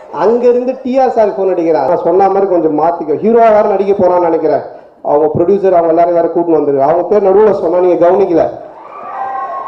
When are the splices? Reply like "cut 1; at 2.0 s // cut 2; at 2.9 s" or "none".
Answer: cut 1; at 1.9 s

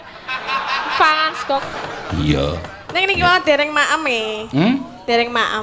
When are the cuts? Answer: cut 1; at 1.7 s

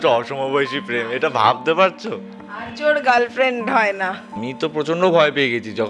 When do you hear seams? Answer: cut 1; at 4.4 s

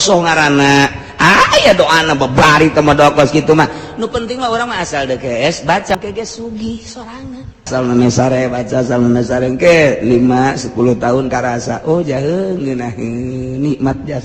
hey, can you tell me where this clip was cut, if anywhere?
cut 1; at 6.0 s // cut 2; at 7.7 s

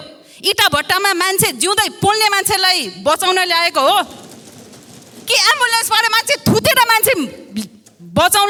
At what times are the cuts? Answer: none

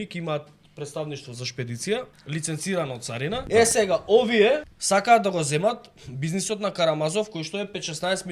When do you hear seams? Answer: cut 1; at 2.2 s // cut 2; at 3.4 s // cut 3; at 4.7 s

